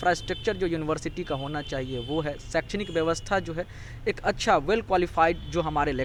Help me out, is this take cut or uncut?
uncut